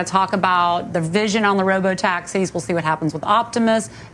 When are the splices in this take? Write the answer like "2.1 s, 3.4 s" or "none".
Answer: none